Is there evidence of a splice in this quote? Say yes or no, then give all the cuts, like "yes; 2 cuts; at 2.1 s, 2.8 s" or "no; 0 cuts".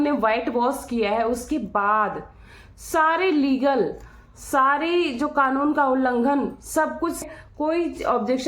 yes; 1 cut; at 7.2 s